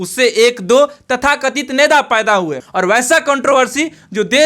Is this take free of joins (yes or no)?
no